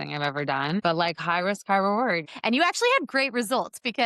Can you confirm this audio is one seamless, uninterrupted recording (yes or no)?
no